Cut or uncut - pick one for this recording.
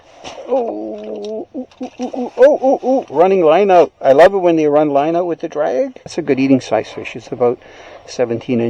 cut